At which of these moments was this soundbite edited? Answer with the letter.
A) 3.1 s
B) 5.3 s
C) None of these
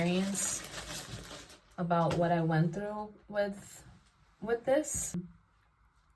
B